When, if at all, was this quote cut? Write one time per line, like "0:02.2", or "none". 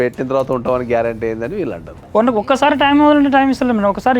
0:02.0